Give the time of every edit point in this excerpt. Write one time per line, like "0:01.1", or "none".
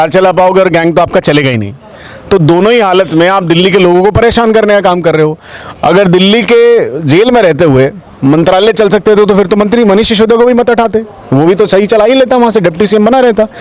none

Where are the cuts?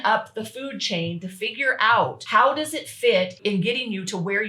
0:02.2
0:03.3

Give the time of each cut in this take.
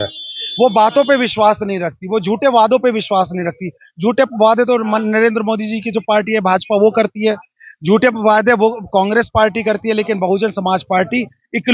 none

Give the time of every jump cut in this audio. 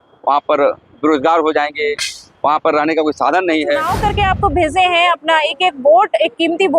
0:03.9

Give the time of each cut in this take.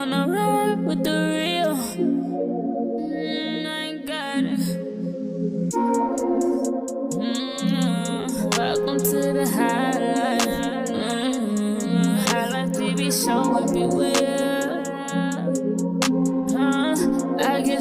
none

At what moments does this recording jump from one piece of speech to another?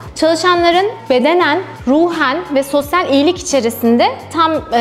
none

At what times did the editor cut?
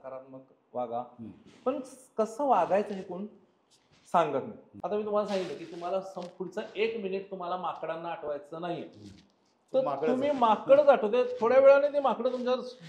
0:04.6

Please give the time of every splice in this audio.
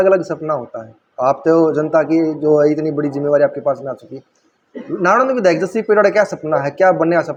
none

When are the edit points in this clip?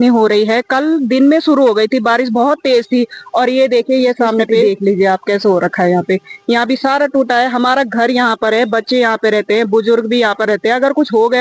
none

